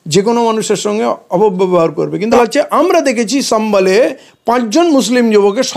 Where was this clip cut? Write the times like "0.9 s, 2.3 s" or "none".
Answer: 2.2 s

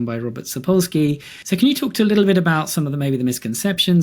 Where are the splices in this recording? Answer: 1.3 s

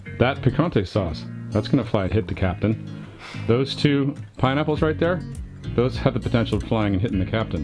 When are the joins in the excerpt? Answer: 2.1 s, 4.3 s

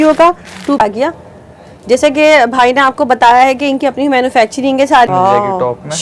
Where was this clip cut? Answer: 0.8 s, 5.1 s

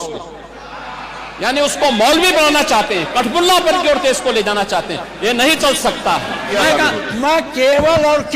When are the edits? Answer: 6.5 s

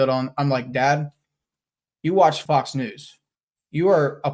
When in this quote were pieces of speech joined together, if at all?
2.4 s

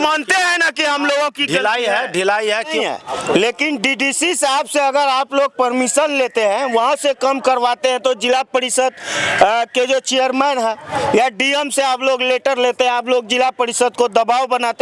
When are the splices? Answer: 2.7 s

